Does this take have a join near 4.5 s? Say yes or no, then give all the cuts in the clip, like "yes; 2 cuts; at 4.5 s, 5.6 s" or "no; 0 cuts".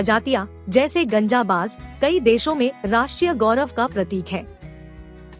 yes; 1 cut; at 4.5 s